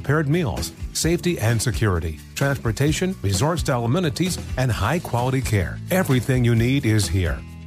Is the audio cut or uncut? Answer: uncut